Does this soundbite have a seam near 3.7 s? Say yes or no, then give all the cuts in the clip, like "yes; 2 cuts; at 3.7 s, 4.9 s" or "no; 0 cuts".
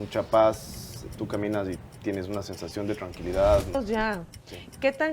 yes; 1 cut; at 3.7 s